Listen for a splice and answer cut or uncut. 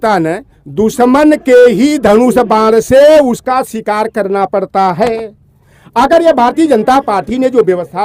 uncut